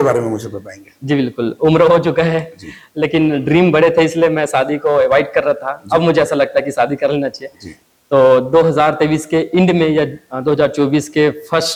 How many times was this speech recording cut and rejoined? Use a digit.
0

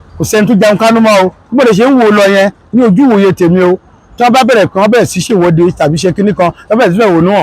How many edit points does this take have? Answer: 1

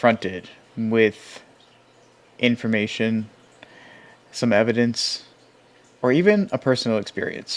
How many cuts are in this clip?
1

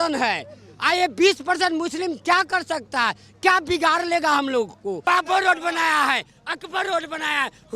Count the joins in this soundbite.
1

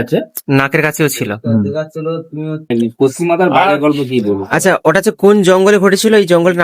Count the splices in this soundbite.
1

